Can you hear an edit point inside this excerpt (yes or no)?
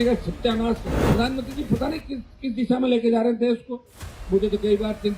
yes